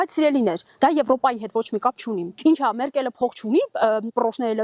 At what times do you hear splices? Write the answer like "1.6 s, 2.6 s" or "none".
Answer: 2.3 s